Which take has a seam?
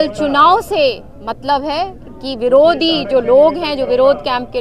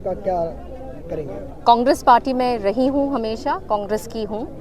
second; 1 cut; at 1.5 s

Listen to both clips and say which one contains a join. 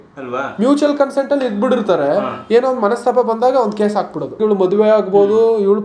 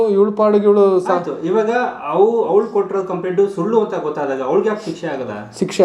first; 1 cut; at 4.4 s

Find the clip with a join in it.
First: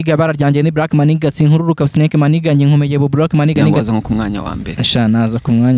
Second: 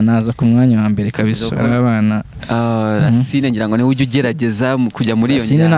first; 1 cut; at 3.7 s

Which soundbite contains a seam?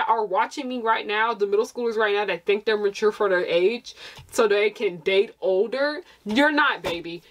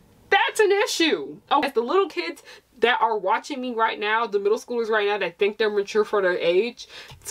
second; 1 cut; at 1.6 s

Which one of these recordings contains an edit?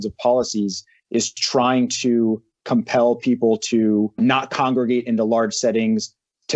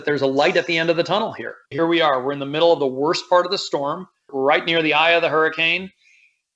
second; 1 cut; at 1.7 s

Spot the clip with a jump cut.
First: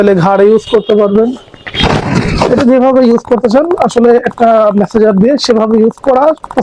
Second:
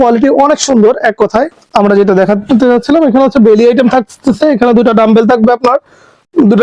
second; 1 cut; at 1.6 s

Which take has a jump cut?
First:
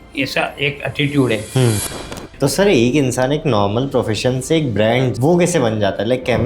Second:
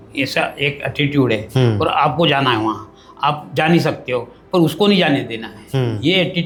first; 2 cuts; at 2.1 s, 5.1 s

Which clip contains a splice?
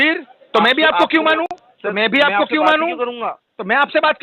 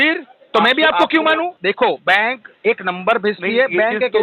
second; 1 cut; at 1.5 s

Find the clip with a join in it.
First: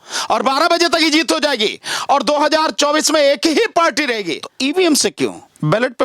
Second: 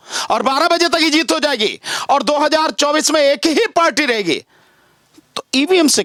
first; 1 cut; at 4.4 s

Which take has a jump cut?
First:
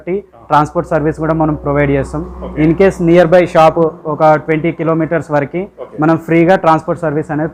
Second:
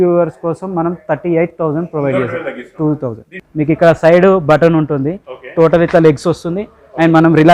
second; 1 cut; at 3.4 s

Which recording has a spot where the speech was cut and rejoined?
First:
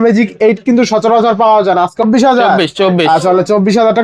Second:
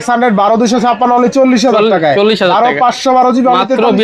first; 1 cut; at 2.0 s

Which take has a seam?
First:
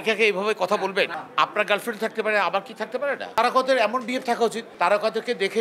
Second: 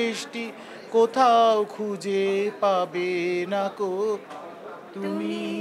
first; 3 cuts; at 1.2 s, 3.3 s, 4.7 s

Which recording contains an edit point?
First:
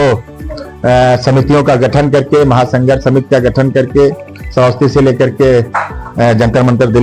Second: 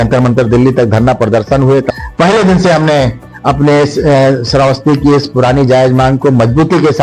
second; 1 cut; at 1.9 s

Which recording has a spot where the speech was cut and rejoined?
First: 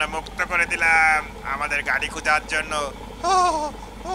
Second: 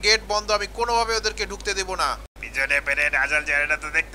second; 1 cut; at 2.6 s

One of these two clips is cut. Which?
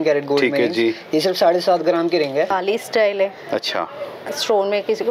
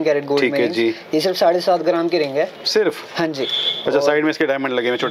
first; 1 cut; at 2.5 s

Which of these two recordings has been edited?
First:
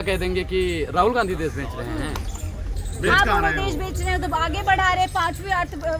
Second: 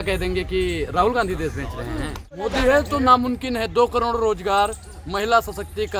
second; 1 cut; at 2.4 s

